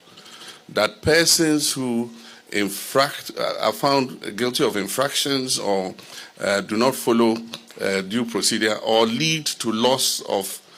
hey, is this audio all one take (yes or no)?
yes